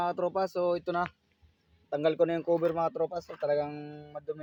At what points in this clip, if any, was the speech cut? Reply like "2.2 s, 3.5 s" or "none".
none